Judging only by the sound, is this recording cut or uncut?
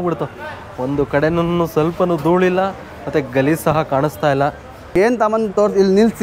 cut